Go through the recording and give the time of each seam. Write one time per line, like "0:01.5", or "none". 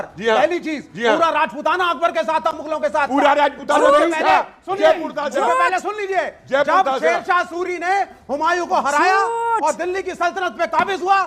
none